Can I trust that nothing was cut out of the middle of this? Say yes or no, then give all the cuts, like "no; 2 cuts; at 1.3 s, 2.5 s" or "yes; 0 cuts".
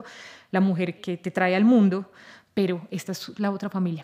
no; 1 cut; at 1.0 s